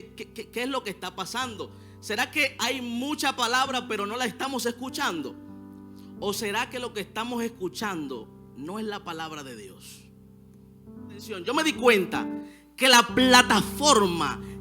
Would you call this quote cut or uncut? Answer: cut